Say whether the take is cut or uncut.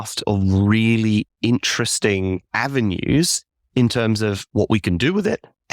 cut